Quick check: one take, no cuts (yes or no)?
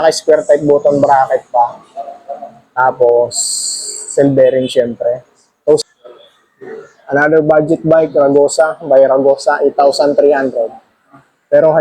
no